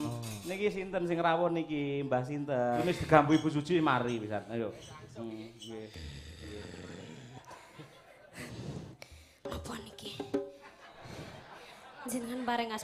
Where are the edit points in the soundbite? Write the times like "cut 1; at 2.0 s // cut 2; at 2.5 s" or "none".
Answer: cut 1; at 2.8 s